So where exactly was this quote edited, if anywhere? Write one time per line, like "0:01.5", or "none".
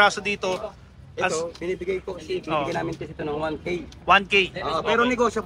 none